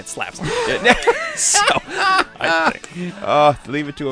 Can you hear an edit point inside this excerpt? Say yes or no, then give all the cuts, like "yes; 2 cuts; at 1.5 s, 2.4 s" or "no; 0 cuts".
no; 0 cuts